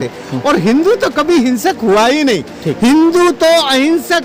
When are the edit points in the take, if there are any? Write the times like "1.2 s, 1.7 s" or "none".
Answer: none